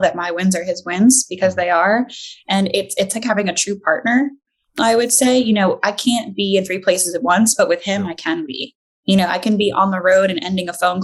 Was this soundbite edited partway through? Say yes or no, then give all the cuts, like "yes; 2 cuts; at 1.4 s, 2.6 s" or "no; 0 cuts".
no; 0 cuts